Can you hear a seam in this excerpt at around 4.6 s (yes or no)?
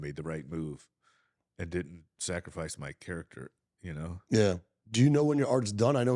yes